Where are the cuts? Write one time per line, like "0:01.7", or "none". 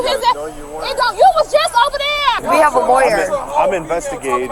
0:02.4